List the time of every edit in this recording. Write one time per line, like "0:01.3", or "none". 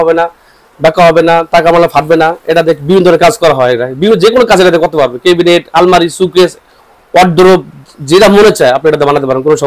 none